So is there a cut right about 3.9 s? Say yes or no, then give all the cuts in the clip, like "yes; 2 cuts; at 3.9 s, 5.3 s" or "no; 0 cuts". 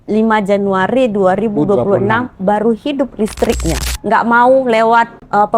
yes; 1 cut; at 3.9 s